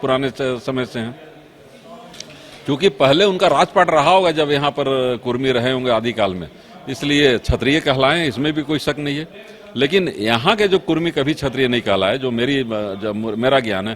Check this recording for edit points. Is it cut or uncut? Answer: uncut